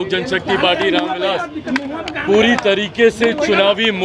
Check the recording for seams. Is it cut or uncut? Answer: uncut